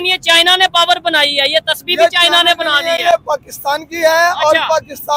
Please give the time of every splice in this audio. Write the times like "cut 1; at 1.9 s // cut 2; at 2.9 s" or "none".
none